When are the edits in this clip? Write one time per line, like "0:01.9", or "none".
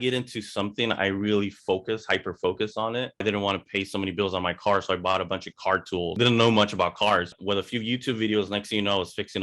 0:03.2
0:06.1
0:07.3